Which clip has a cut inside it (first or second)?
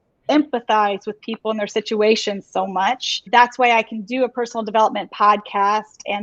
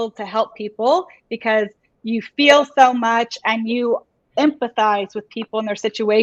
first